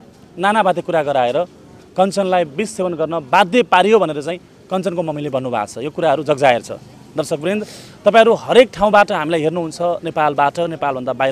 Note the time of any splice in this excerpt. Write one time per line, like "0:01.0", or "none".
none